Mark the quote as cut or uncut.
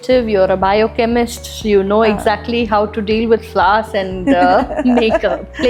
uncut